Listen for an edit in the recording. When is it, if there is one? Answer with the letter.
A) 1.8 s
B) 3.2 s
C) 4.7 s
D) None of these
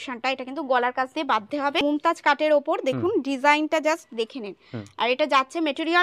A